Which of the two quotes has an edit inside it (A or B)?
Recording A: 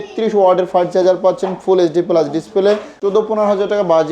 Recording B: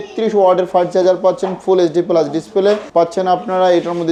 A